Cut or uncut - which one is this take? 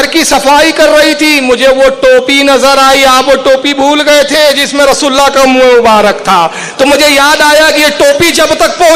uncut